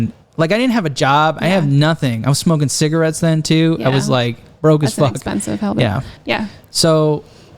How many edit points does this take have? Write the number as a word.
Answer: one